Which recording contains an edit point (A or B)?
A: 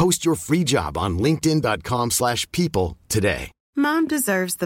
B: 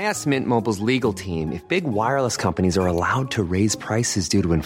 A